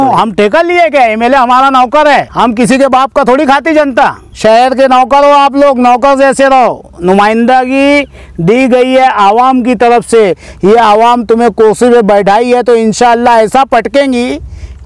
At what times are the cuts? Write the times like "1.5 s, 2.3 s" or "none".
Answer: 2.3 s, 4.2 s